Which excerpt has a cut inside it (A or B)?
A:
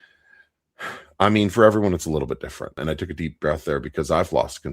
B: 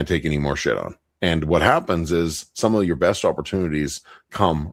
A